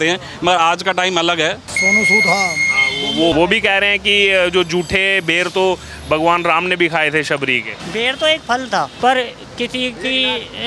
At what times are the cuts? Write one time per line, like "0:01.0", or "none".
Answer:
0:01.7
0:03.3
0:07.8
0:08.9